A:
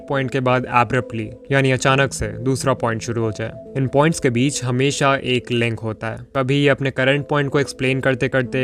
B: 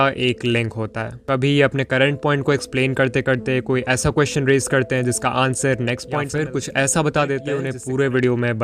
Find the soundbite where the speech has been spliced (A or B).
B